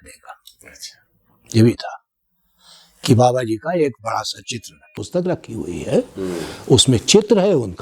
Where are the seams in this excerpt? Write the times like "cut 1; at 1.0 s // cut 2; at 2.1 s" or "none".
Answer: cut 1; at 5.0 s